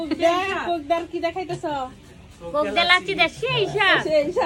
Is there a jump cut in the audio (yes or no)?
no